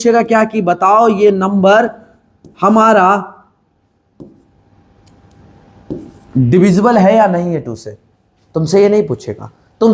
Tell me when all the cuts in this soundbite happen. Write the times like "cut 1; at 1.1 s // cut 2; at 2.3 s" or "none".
none